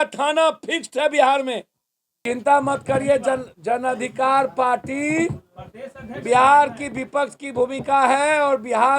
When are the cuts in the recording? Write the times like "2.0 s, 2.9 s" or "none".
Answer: 2.1 s